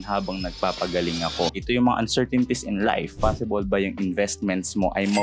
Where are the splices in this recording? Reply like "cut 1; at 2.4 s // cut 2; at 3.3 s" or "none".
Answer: cut 1; at 1.5 s // cut 2; at 3.2 s